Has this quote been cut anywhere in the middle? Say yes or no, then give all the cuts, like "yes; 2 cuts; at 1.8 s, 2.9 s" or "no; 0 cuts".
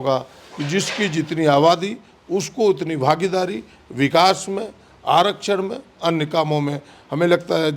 no; 0 cuts